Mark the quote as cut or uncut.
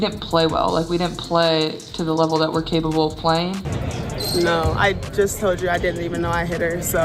cut